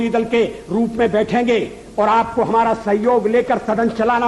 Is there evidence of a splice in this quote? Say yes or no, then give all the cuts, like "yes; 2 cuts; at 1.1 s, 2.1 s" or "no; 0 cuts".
no; 0 cuts